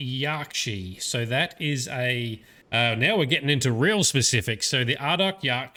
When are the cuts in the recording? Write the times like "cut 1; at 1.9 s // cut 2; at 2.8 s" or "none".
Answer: none